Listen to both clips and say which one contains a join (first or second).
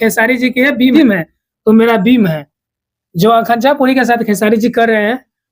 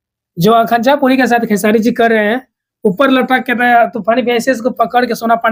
first